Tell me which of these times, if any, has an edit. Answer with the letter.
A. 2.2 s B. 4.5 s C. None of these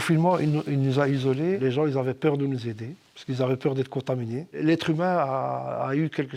B